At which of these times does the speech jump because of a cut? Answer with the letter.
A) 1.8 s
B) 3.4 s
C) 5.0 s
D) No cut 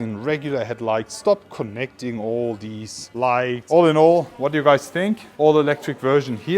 B